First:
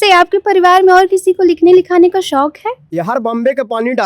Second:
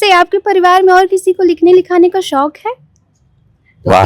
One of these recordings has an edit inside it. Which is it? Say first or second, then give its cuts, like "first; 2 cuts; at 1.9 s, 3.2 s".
first; 1 cut; at 2.8 s